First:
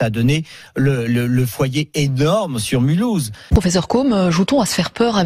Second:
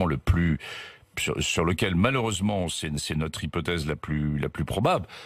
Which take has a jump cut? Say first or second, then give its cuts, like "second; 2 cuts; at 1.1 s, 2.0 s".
first; 1 cut; at 3.4 s